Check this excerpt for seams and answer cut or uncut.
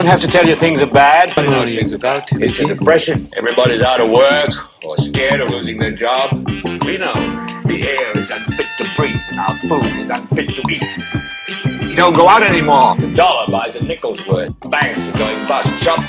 cut